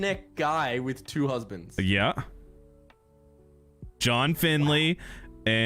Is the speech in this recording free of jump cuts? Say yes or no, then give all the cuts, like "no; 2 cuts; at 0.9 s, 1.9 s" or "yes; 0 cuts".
yes; 0 cuts